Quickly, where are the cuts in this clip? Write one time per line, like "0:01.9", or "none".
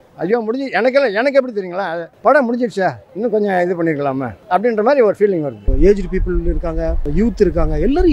0:02.0
0:03.1
0:04.3
0:05.6
0:07.0